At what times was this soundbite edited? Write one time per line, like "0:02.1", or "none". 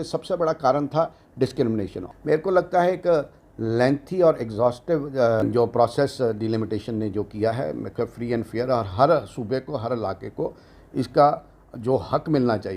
0:02.0
0:05.4